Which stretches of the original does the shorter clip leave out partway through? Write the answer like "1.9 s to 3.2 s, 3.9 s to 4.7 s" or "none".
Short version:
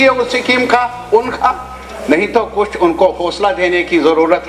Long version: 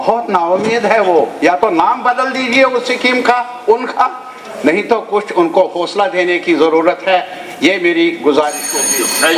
none